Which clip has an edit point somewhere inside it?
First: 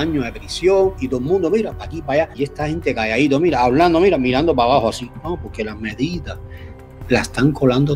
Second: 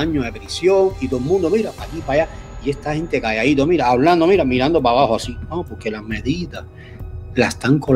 first; 1 cut; at 2.3 s

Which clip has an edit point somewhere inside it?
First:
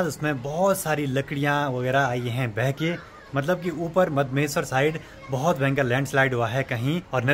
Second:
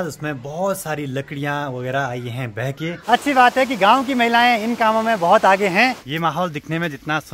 second; 2 cuts; at 2.9 s, 6.1 s

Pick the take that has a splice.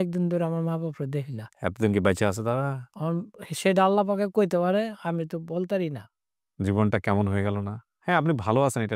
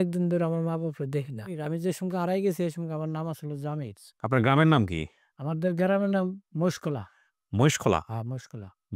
second; 2 cuts; at 1.6 s, 4.0 s

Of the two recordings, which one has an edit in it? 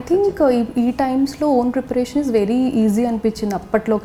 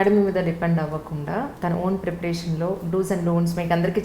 second; 1 cut; at 1.5 s

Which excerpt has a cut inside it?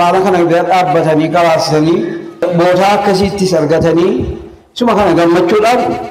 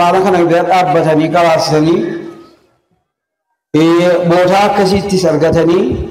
first; 1 cut; at 2.4 s

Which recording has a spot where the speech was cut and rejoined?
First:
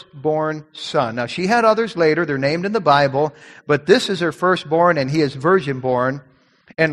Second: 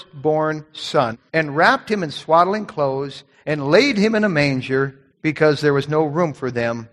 second; 2 cuts; at 1.2 s, 5.0 s

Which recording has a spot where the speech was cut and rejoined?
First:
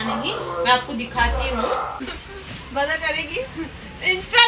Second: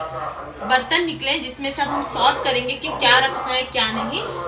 first; 1 cut; at 2.0 s

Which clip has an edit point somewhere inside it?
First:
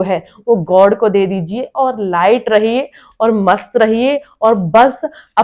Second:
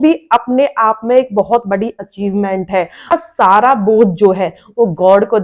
second; 1 cut; at 3.1 s

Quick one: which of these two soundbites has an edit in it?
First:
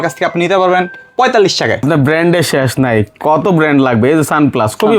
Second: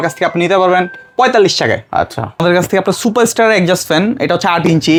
first; 1 cut; at 1.8 s

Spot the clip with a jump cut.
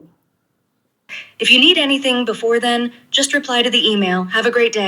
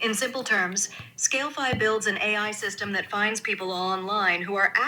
first; 1 cut; at 1.1 s

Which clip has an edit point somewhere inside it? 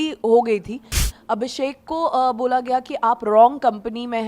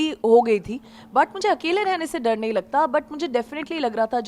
first; 1 cut; at 1.0 s

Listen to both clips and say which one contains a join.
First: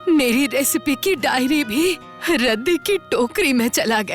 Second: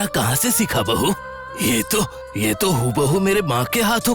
first; 1 cut; at 2.1 s

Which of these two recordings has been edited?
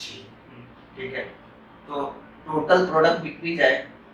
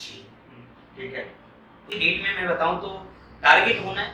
second; 1 cut; at 1.9 s

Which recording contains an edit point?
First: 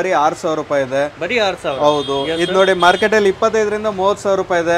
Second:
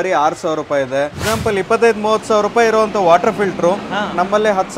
second; 1 cut; at 1.2 s

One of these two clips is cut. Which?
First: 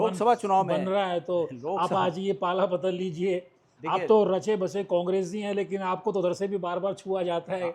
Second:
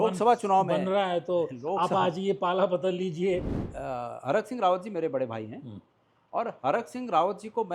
second; 1 cut; at 3.6 s

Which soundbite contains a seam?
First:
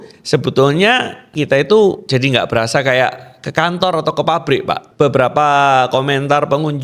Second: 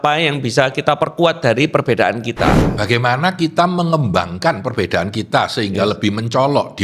first; 2 cuts; at 1.3 s, 4.9 s

